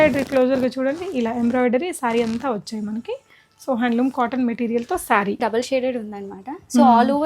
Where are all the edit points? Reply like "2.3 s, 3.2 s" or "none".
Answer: 5.4 s